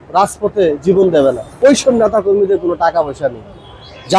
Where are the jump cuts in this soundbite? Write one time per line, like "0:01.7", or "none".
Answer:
0:01.5